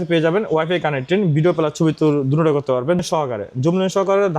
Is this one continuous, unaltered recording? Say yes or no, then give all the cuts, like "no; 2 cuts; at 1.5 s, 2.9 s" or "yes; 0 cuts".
no; 1 cut; at 3.0 s